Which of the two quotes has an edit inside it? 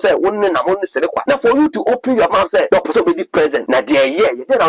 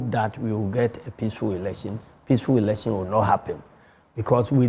first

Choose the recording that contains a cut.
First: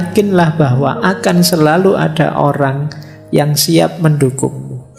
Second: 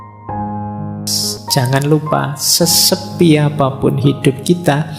second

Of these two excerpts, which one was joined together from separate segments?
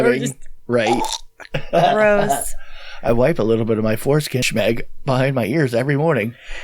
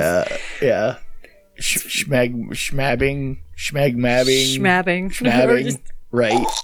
first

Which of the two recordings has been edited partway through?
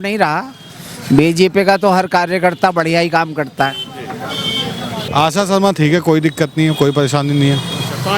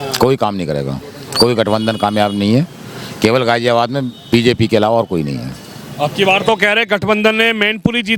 first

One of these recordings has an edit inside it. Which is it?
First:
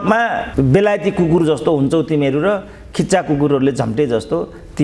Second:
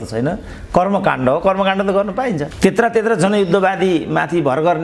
second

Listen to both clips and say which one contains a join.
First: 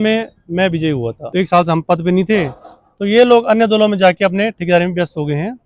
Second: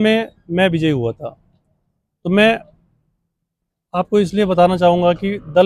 first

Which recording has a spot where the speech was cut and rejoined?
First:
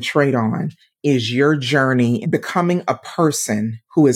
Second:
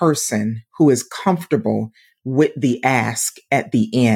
first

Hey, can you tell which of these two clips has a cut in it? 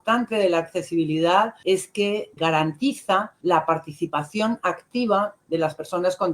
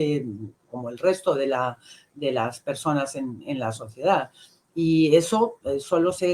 first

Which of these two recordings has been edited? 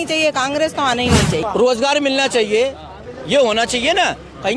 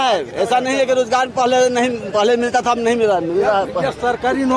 first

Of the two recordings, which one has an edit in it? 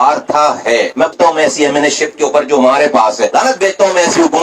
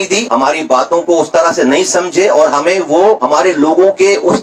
first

